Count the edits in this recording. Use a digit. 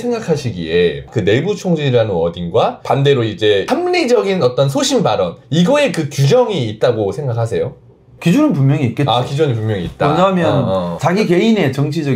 0